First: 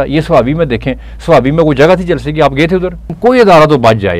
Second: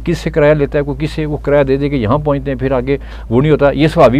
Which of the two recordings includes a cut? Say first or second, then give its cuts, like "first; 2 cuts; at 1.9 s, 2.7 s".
first; 1 cut; at 3.1 s